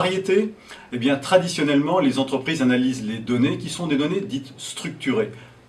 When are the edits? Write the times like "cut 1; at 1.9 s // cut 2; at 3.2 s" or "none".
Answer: cut 1; at 1.4 s